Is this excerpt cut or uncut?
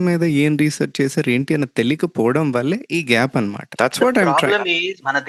uncut